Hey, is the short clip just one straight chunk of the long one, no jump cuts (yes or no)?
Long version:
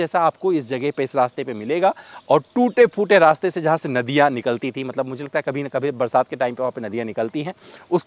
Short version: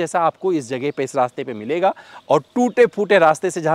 yes